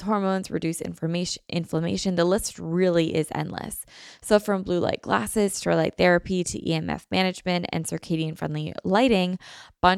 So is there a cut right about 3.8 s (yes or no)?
no